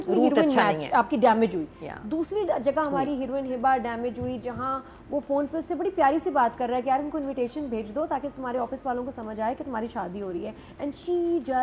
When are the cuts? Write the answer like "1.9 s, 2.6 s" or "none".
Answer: none